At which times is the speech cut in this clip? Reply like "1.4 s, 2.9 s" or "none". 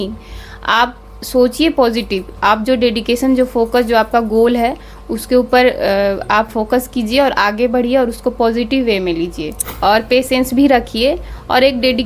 9.6 s

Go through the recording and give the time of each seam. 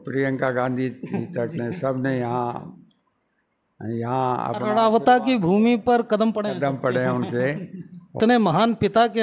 8.2 s

